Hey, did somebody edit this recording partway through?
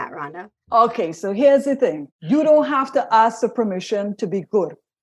yes; 1 cut; at 2.1 s

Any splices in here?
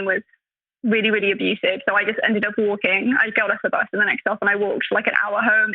no; 0 cuts

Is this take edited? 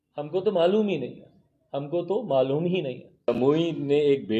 yes; 1 cut; at 3.3 s

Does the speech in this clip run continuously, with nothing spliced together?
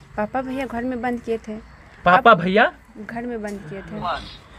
yes; 0 cuts

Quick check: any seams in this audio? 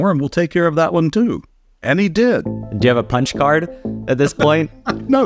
no; 0 cuts

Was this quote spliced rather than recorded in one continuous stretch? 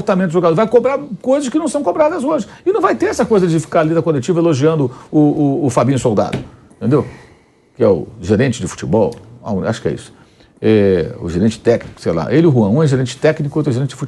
no; 0 cuts

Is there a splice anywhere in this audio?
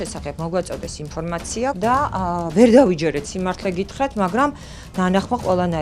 yes; 1 cut; at 1.8 s

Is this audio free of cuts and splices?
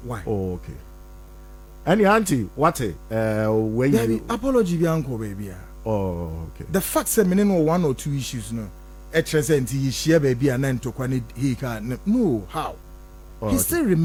yes; 0 cuts

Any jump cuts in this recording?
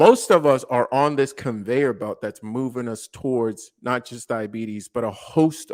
no; 0 cuts

